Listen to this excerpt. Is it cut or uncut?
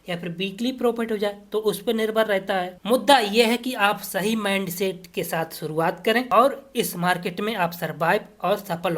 cut